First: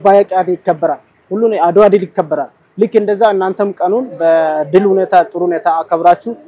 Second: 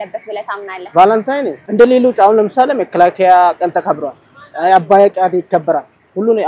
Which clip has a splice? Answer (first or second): second